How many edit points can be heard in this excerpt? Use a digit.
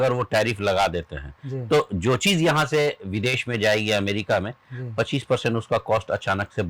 0